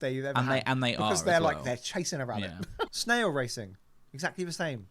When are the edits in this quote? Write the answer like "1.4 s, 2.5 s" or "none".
2.9 s